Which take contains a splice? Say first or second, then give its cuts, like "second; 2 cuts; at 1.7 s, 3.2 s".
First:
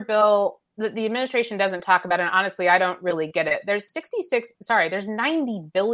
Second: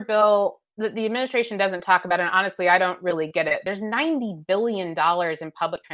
second; 1 cut; at 3.6 s